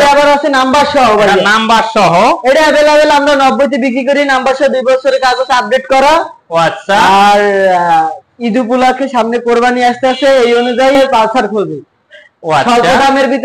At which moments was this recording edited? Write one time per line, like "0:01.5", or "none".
0:11.0